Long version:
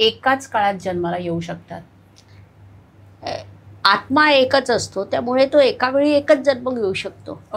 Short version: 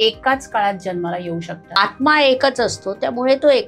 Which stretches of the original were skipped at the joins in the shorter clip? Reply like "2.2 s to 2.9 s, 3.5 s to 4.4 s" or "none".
1.8 s to 3.9 s